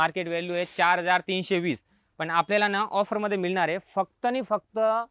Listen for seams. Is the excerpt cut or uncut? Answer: uncut